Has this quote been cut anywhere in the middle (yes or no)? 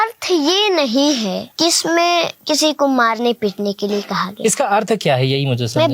yes